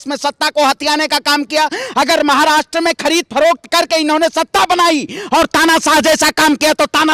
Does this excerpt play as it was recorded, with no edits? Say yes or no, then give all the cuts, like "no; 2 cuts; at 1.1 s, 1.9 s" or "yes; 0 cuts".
yes; 0 cuts